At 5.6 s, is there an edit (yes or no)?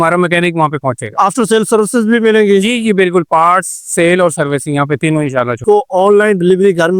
yes